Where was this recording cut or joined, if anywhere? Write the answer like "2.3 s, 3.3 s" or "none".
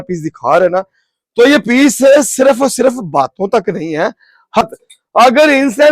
4.6 s